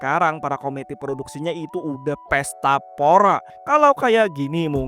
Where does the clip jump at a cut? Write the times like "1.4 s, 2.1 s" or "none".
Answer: 3.5 s

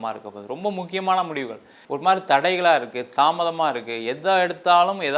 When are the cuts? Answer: 1.7 s

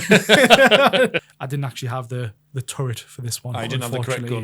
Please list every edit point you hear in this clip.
1.3 s

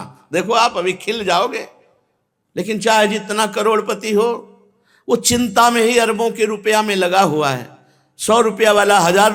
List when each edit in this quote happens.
none

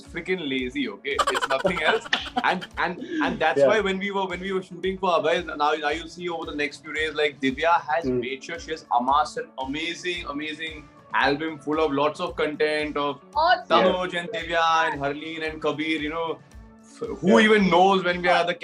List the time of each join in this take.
none

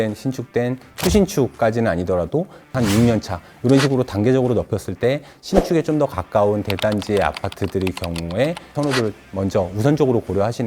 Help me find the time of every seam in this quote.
2.7 s, 8.7 s

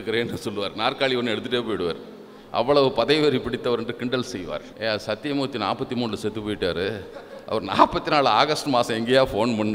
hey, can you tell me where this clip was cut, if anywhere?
4.7 s

